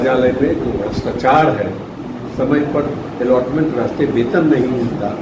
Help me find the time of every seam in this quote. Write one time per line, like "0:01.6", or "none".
none